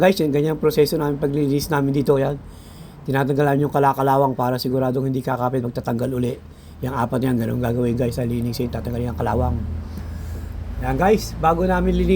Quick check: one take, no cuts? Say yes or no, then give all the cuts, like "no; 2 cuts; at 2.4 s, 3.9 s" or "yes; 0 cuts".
yes; 0 cuts